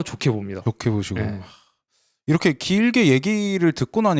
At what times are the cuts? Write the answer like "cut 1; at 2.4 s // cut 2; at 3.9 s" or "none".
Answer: none